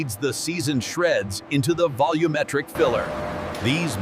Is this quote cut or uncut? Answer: cut